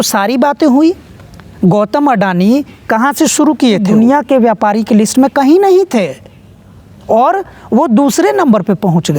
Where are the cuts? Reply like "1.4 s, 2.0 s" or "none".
3.9 s